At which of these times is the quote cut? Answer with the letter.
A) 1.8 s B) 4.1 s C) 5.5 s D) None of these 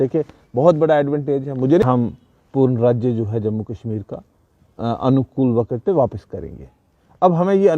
A